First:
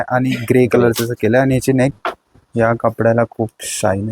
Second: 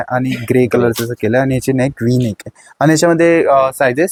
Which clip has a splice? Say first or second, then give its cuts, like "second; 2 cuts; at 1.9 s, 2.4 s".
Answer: first; 1 cut; at 2.0 s